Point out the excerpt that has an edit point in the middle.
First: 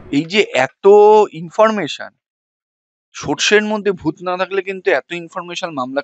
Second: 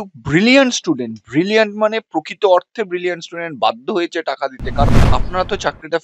second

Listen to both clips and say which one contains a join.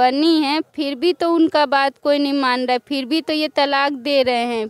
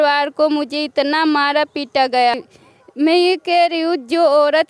second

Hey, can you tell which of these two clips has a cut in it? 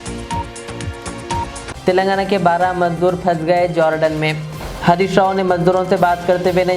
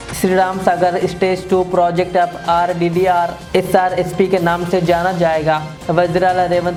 first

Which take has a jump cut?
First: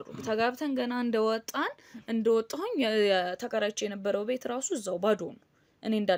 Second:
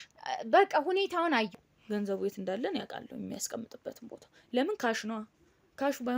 second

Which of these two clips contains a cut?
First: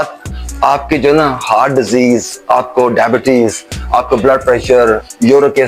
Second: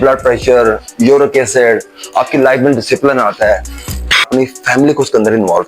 second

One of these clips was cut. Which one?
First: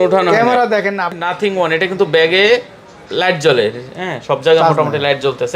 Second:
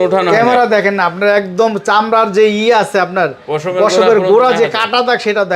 first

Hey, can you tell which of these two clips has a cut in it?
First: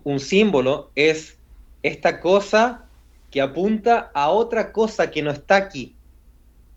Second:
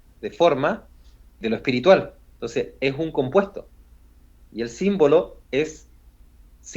second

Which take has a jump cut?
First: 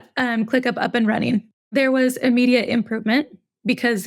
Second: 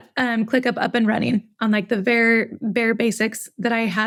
first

